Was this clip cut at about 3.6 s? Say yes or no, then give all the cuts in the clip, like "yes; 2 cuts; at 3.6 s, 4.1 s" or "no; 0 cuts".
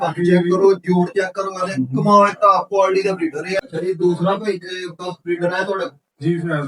yes; 1 cut; at 3.6 s